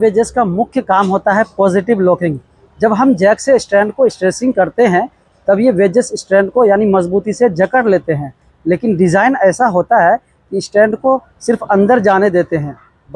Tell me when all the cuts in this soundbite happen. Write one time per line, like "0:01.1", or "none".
none